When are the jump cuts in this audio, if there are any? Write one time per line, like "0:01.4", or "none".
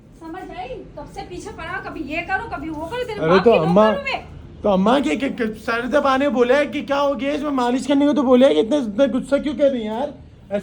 none